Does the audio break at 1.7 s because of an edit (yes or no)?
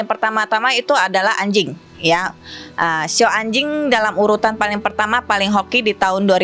no